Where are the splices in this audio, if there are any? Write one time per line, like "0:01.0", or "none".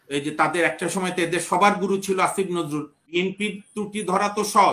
0:03.0